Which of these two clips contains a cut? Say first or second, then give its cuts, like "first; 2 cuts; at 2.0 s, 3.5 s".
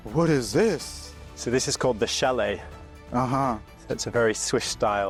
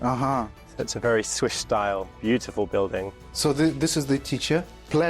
second; 1 cut; at 3.2 s